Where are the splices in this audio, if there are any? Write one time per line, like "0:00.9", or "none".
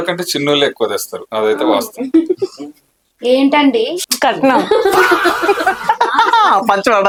none